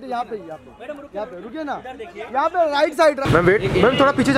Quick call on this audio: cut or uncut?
cut